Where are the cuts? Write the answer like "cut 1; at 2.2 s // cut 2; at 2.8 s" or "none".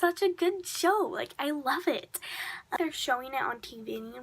cut 1; at 2.8 s